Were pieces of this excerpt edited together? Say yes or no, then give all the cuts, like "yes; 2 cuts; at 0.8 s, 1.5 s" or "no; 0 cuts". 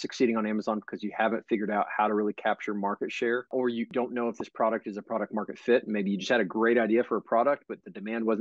yes; 1 cut; at 3.9 s